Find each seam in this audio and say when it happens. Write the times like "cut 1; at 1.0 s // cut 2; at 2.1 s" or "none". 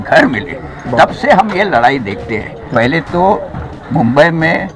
cut 1; at 2.6 s